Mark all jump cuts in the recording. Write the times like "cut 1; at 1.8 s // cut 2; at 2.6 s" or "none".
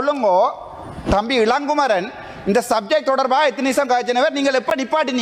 none